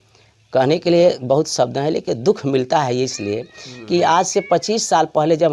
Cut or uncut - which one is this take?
uncut